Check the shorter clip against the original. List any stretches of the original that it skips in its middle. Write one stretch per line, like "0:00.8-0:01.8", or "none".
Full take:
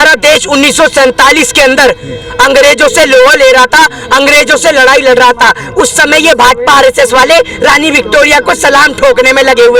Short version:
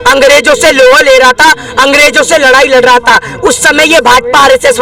none